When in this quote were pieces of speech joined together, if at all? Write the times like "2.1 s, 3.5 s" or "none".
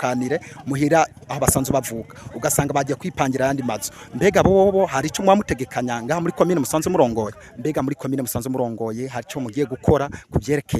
7.4 s